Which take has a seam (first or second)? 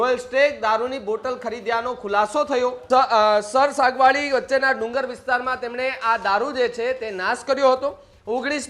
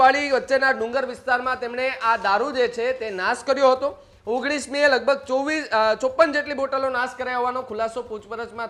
first